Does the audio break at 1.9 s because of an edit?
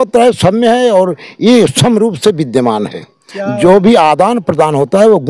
no; 0 cuts

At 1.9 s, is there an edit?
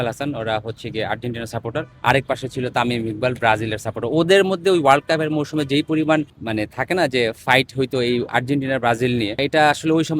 yes; 3 cuts; at 1.9 s, 6.4 s, 9.4 s

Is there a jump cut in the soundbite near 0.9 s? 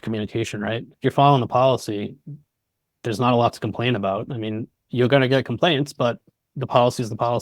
yes; 1 cut; at 0.9 s

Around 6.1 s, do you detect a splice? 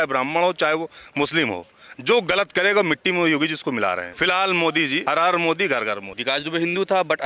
yes; 3 cuts; at 4.1 s, 5.0 s, 6.1 s

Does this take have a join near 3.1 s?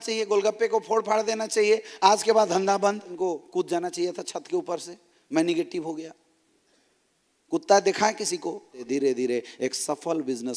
yes; 2 cuts; at 3.1 s, 8.8 s

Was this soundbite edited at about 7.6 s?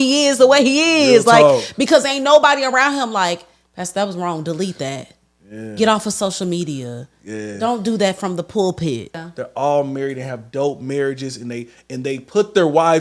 no; 1 cut; at 9.2 s

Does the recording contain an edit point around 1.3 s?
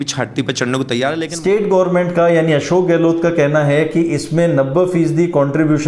yes; 1 cut; at 1.3 s

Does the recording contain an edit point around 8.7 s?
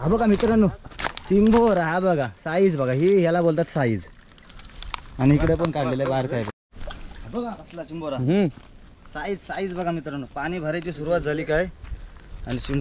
no; 1 cut; at 6.5 s

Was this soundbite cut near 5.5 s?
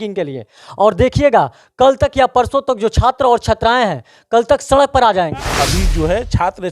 yes; 1 cut; at 5.5 s

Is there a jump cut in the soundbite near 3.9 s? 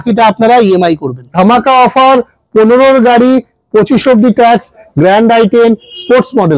no; 1 cut; at 1.2 s

